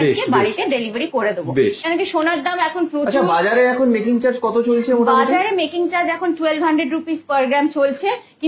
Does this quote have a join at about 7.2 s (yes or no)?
no